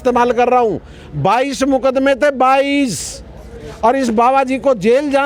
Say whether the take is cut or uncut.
uncut